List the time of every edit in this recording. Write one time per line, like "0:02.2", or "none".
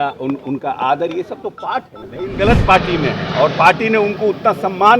0:02.3

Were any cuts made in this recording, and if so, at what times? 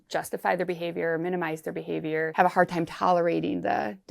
0:02.3

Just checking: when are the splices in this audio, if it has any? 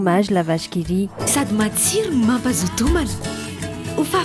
none

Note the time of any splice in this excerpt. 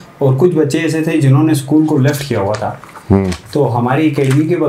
none

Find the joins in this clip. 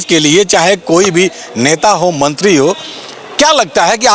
none

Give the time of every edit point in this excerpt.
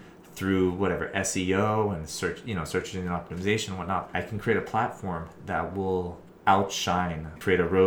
0:04.1
0:06.2

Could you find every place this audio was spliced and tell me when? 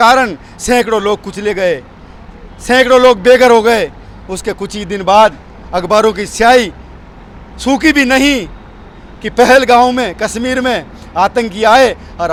none

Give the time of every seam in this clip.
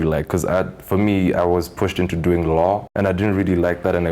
0:02.9

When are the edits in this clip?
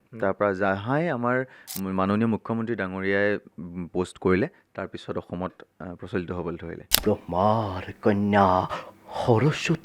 0:07.0

